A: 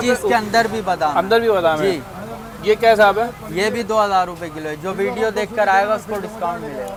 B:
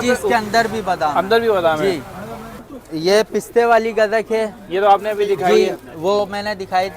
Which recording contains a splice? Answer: B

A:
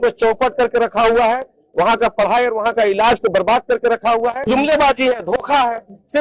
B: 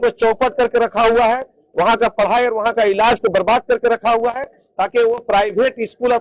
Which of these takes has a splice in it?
A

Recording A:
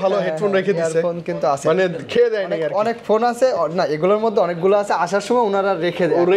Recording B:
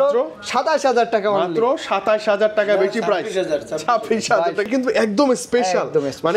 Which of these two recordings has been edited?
B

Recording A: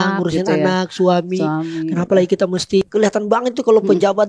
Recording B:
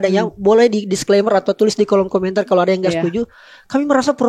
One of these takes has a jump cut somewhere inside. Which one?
A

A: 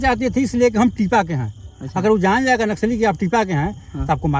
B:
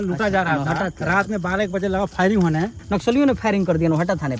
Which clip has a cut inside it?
B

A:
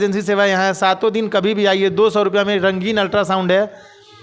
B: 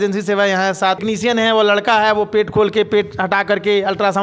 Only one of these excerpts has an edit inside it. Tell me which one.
B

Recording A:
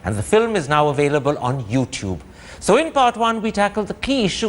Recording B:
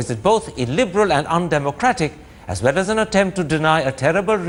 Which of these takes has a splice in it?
A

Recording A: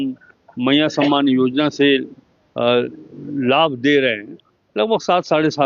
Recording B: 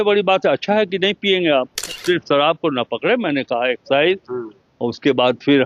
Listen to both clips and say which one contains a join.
B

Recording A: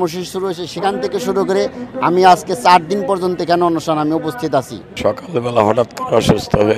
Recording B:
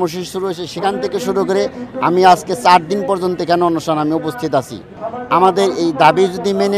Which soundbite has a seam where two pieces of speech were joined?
A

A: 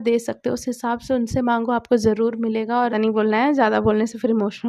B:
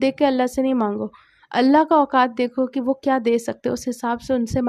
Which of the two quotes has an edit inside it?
A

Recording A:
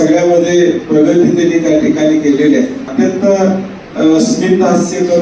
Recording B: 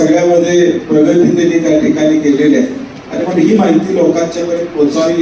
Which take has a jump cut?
A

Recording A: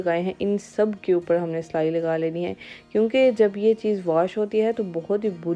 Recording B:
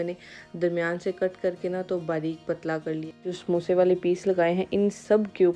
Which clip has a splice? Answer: B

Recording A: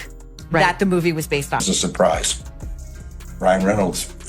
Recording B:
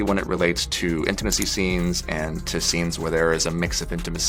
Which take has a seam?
A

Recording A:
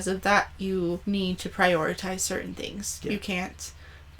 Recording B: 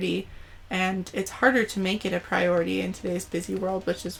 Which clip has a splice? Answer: A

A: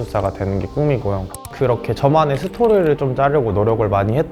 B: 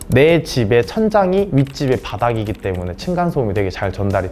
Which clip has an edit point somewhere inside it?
A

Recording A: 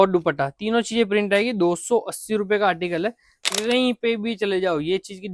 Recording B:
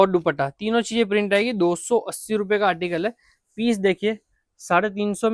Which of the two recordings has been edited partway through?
A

